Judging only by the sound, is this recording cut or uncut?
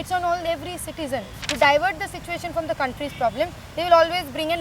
cut